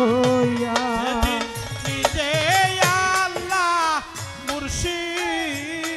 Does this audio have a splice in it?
no; 0 cuts

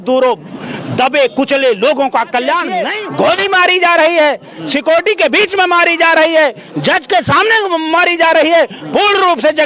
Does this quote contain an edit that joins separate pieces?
yes; 1 cut; at 3.0 s

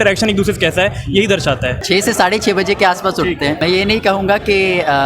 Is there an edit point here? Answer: yes; 2 cuts; at 1.8 s, 3.6 s

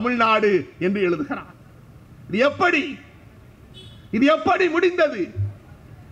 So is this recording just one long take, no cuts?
yes; 0 cuts

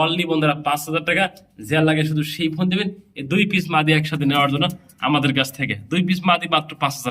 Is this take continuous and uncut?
yes; 0 cuts

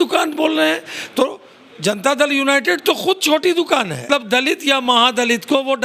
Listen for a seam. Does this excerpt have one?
yes; 1 cut; at 4.0 s

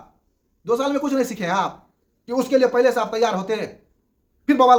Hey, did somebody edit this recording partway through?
no; 0 cuts

